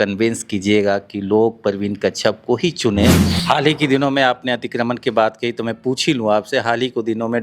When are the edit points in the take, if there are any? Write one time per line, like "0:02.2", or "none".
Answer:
0:03.2